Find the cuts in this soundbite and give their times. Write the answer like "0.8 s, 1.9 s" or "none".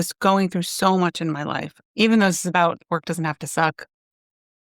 1.7 s, 2.8 s